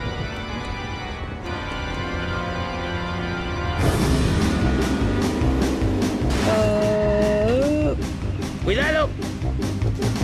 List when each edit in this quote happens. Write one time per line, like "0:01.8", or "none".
0:08.5